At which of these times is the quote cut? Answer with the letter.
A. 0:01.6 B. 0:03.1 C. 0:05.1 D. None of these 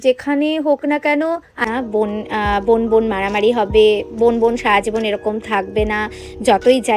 A